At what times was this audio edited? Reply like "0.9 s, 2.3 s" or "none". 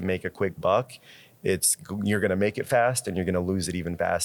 none